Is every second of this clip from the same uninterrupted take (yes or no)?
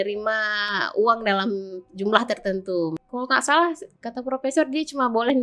no